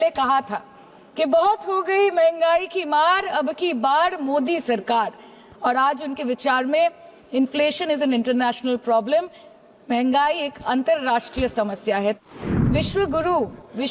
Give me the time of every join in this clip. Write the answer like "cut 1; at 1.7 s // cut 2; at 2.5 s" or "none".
cut 1; at 12.2 s